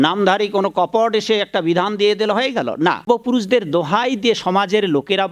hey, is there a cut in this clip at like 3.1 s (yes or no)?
yes